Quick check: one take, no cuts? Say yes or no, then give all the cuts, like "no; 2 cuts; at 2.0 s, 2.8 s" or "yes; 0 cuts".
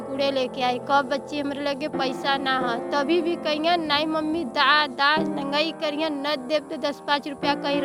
yes; 0 cuts